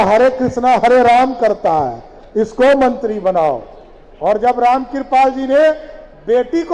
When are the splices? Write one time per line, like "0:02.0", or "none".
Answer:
none